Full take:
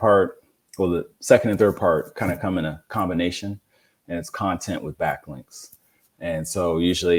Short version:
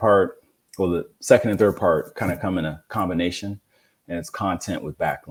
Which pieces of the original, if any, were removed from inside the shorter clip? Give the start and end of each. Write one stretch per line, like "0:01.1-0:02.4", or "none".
none